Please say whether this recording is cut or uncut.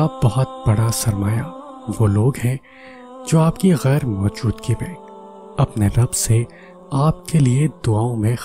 uncut